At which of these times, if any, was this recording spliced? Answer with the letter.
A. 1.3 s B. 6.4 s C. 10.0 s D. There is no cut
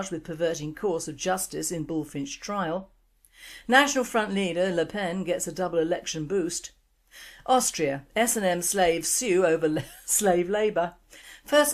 B